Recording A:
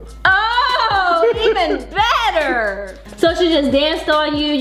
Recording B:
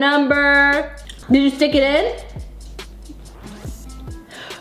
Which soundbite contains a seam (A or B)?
B